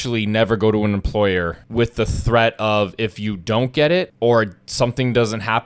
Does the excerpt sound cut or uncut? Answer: cut